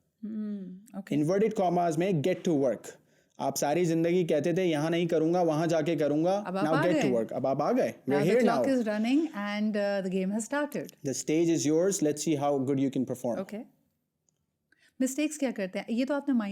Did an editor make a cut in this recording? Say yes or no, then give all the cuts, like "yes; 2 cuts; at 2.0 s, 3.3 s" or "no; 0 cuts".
no; 0 cuts